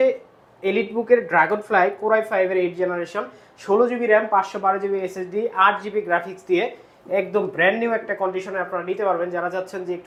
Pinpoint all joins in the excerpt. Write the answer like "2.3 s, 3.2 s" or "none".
none